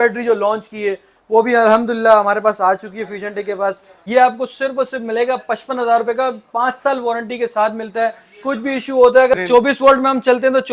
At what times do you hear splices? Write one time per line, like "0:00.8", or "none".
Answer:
0:03.9
0:09.3